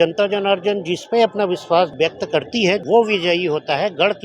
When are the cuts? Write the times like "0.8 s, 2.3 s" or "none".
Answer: 2.5 s